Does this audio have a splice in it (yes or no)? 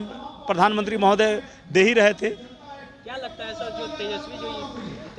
no